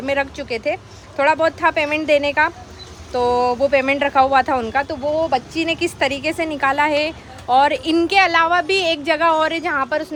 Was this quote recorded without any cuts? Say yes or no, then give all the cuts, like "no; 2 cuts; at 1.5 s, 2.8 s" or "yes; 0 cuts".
yes; 0 cuts